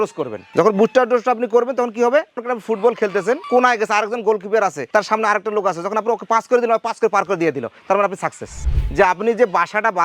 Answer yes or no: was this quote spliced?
yes